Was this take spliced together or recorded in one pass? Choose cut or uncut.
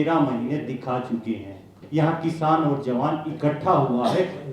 cut